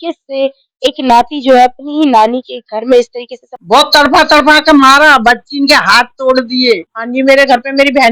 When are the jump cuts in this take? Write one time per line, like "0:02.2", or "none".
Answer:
0:03.5
0:07.0